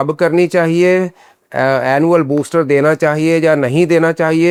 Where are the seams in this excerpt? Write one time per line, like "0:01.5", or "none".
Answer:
none